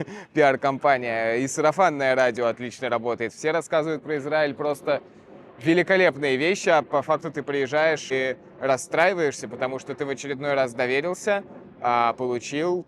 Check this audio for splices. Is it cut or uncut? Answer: cut